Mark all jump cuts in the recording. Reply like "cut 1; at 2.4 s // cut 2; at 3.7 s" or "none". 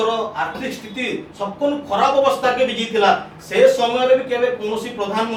none